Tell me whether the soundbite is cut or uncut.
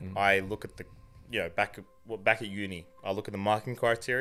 uncut